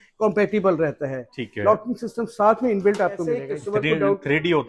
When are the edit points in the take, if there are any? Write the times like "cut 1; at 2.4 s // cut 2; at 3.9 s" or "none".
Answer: cut 1; at 3.5 s